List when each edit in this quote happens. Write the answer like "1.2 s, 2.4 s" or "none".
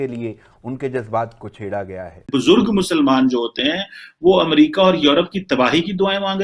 2.3 s